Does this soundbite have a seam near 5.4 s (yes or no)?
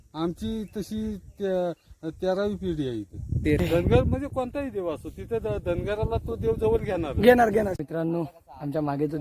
no